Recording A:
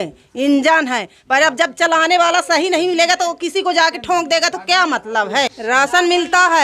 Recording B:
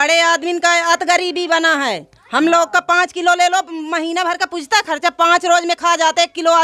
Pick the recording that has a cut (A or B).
A